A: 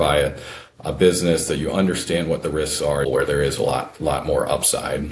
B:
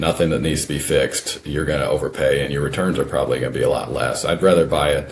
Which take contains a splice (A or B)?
A